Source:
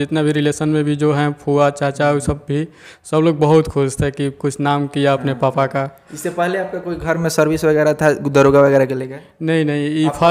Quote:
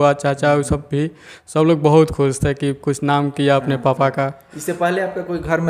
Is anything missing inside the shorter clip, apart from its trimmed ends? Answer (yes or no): no